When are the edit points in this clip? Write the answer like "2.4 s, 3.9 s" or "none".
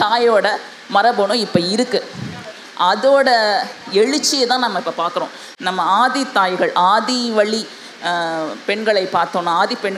5.4 s